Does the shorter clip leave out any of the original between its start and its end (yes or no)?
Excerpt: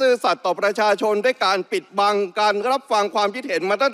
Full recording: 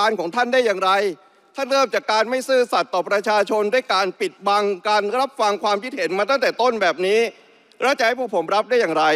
no